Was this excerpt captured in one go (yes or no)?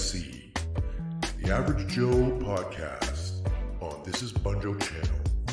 no